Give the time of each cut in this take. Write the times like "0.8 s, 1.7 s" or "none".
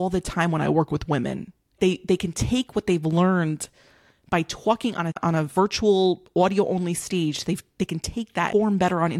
1.8 s, 5.2 s, 8.5 s